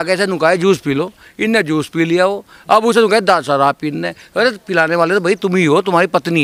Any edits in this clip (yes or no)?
no